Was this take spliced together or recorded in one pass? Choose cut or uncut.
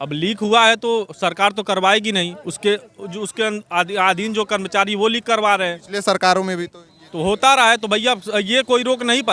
uncut